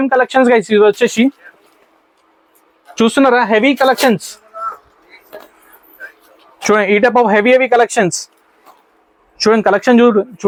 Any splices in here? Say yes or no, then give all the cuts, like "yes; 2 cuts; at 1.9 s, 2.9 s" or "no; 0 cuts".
no; 0 cuts